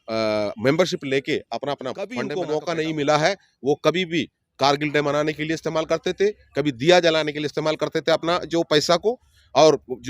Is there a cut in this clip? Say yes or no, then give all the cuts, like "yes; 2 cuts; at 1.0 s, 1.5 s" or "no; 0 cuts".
yes; 1 cut; at 2.3 s